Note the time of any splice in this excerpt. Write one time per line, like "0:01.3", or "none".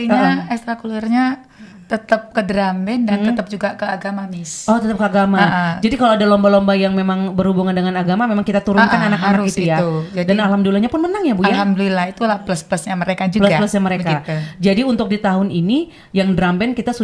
none

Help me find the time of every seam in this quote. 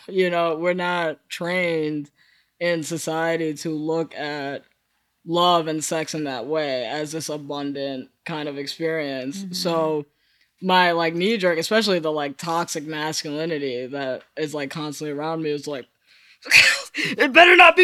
none

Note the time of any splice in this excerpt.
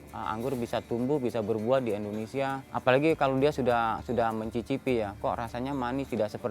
0:02.7

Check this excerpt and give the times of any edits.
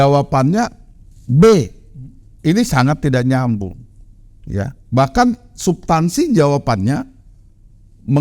0:02.2

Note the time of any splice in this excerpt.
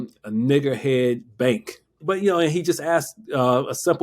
0:02.0

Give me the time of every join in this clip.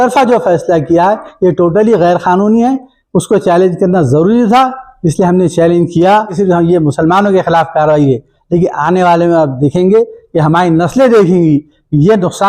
0:06.4

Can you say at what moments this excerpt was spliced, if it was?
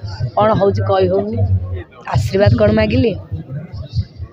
0:01.6

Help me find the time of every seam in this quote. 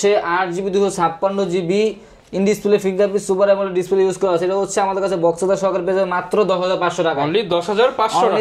none

